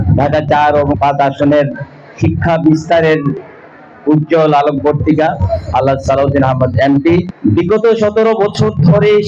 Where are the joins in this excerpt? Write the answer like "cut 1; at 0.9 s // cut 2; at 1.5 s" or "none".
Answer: none